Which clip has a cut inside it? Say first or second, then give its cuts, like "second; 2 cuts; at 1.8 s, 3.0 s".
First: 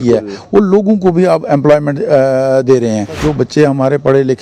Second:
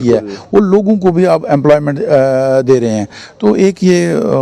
first; 1 cut; at 3.2 s